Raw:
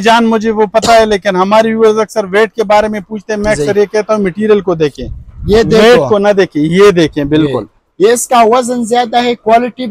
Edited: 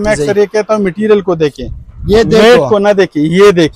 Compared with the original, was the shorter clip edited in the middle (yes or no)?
no